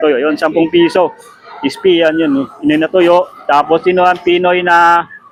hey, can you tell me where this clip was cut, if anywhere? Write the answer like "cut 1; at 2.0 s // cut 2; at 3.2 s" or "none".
none